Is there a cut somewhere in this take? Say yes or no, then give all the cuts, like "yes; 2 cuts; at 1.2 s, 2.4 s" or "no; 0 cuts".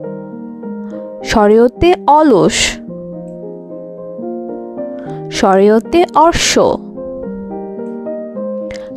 yes; 1 cut; at 1.3 s